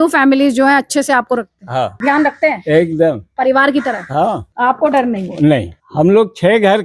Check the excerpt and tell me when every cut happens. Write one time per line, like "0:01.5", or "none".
0:01.9
0:04.5
0:05.8